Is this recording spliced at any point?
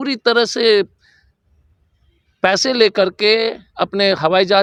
no; 0 cuts

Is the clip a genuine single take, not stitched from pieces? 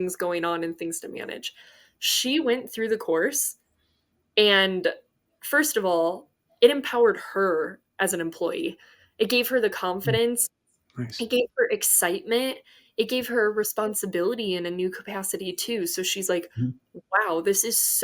yes; 0 cuts

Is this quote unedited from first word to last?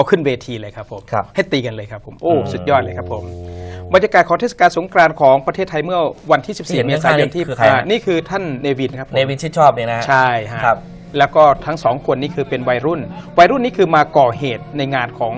no; 1 cut; at 2.3 s

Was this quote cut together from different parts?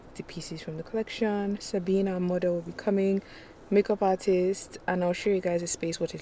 no; 0 cuts

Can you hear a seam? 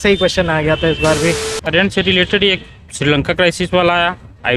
yes; 1 cut; at 1.5 s

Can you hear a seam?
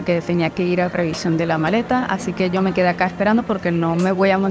no; 0 cuts

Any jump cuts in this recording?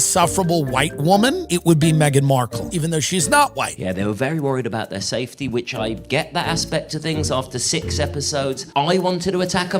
yes; 1 cut; at 3.7 s

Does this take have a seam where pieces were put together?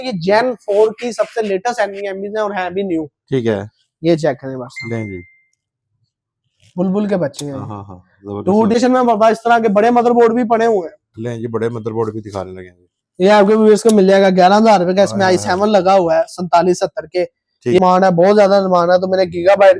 yes; 2 cuts; at 8.8 s, 17.8 s

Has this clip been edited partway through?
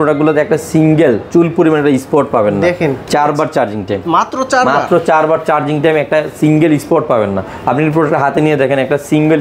yes; 1 cut; at 3.0 s

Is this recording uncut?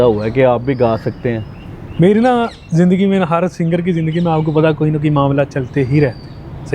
yes; 0 cuts

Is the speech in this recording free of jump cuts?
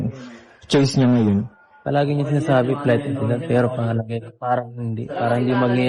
yes; 0 cuts

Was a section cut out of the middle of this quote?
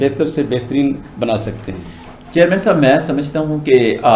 no; 0 cuts

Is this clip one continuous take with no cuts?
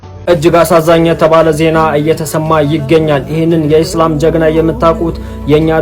yes; 0 cuts

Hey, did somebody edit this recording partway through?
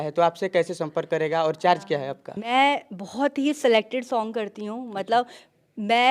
yes; 1 cut; at 2.4 s

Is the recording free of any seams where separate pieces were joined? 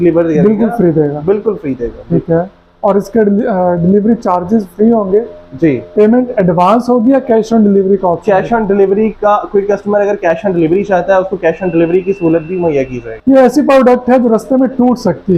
yes; 0 cuts

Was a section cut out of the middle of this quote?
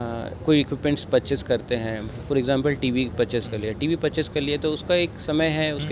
no; 0 cuts

